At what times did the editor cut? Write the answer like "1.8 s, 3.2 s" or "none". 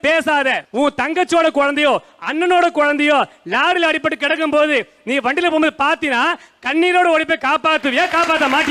none